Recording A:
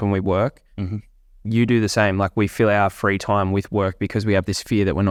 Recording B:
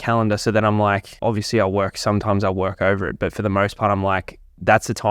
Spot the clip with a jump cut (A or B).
B